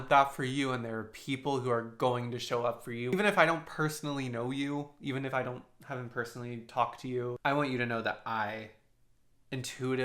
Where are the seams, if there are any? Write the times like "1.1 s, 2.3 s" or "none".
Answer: 3.1 s, 7.4 s